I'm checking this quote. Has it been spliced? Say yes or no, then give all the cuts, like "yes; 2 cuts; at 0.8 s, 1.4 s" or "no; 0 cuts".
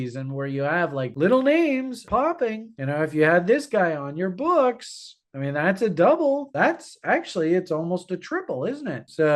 yes; 2 cuts; at 1.1 s, 2.1 s